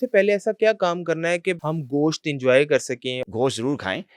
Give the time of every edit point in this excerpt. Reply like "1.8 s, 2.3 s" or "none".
1.6 s, 3.3 s